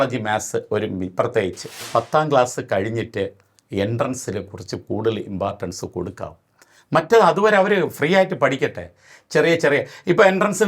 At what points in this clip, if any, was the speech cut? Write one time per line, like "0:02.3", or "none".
0:01.8